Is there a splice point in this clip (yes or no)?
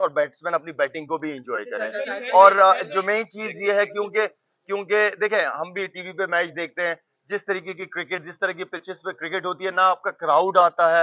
no